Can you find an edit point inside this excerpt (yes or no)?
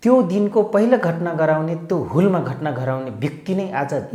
no